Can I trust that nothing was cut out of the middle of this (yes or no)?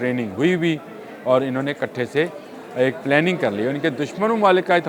yes